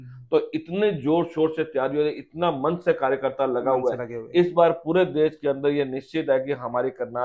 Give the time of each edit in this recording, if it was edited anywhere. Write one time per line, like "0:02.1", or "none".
none